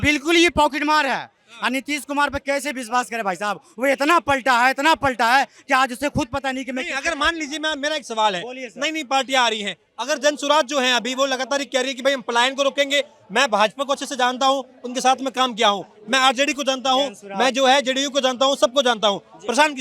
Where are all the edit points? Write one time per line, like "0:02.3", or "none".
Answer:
none

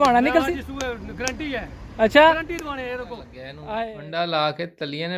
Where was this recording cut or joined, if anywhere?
0:03.5

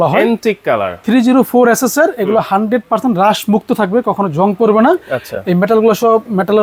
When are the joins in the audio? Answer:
none

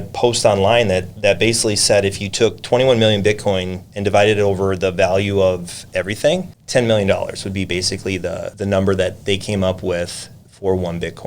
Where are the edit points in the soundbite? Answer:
0:06.6
0:08.5

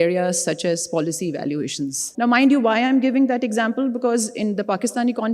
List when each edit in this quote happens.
0:02.0

